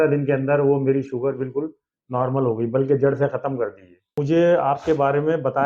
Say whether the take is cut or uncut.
cut